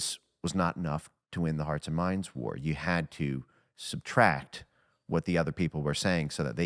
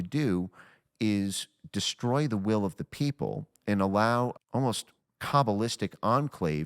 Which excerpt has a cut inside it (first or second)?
second